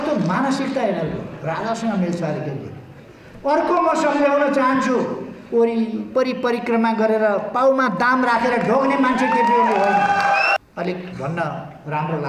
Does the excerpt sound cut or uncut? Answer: cut